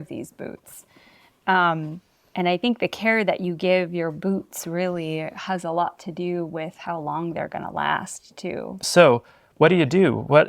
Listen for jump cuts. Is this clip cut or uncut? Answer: cut